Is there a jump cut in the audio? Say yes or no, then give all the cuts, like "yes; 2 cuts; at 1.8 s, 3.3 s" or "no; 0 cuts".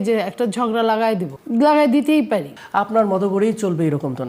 yes; 2 cuts; at 1.3 s, 2.3 s